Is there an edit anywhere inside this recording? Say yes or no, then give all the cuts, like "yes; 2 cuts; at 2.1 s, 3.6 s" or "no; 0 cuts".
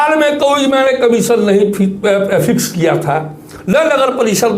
no; 0 cuts